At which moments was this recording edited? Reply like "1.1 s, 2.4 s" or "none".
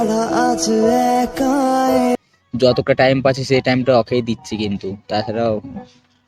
2.1 s